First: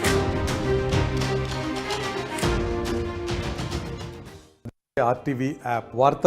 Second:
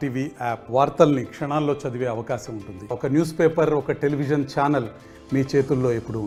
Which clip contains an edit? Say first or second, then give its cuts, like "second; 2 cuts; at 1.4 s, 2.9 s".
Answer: first; 1 cut; at 3.1 s